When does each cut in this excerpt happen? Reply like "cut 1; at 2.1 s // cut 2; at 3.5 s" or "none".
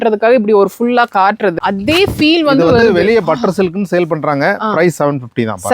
cut 1; at 1.6 s